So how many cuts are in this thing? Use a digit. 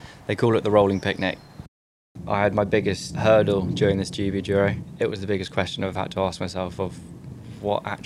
3